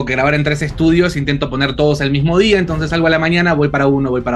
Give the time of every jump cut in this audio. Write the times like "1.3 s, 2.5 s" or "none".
none

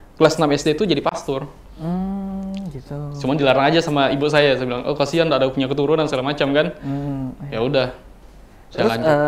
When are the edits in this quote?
none

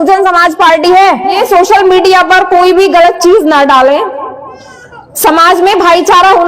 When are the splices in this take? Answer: 1.4 s

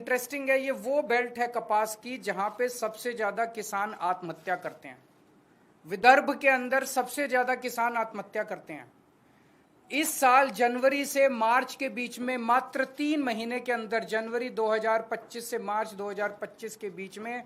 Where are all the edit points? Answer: none

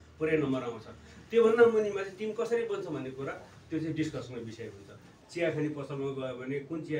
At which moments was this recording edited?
5.1 s

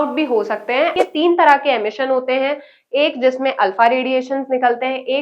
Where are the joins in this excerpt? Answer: 1.0 s

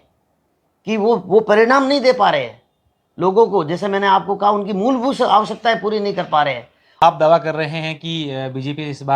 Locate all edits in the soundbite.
7.0 s

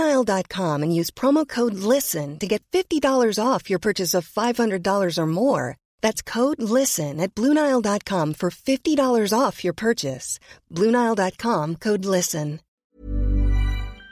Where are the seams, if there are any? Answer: 12.9 s

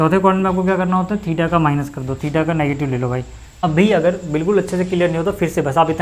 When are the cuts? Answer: 3.4 s

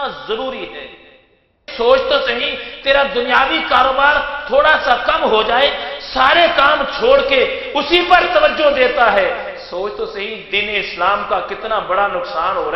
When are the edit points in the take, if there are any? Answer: 1.7 s

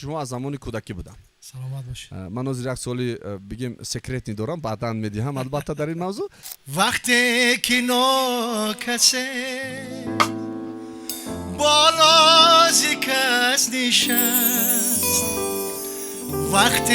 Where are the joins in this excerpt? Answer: 6.5 s

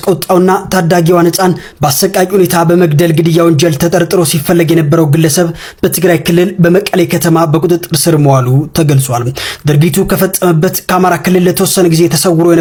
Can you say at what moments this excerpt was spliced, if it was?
none

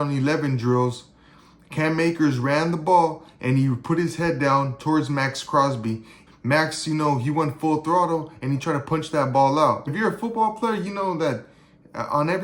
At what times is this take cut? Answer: 6.2 s, 9.9 s

